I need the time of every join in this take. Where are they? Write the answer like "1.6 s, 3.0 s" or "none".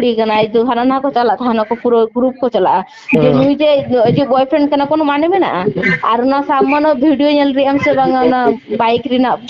2.9 s